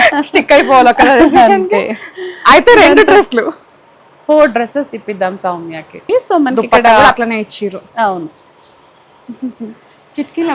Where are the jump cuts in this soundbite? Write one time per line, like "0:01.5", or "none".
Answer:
0:06.0